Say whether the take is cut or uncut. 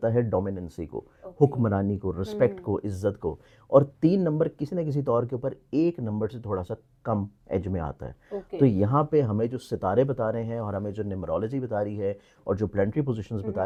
uncut